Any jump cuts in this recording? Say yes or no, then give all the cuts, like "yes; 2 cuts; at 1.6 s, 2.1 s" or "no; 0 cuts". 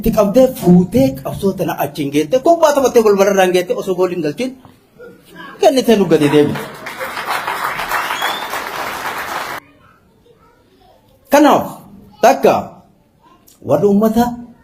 yes; 1 cut; at 9.6 s